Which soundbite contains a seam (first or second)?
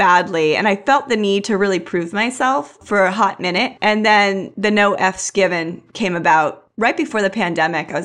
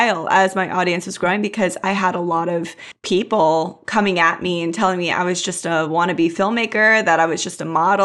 first